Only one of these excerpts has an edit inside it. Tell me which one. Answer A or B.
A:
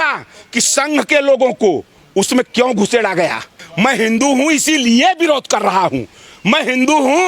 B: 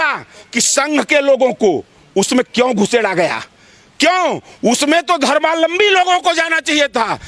A